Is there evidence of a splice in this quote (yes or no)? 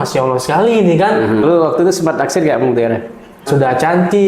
yes